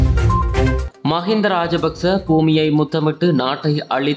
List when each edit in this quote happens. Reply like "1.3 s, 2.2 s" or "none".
1.0 s